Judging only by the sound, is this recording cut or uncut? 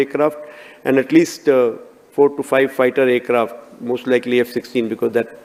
uncut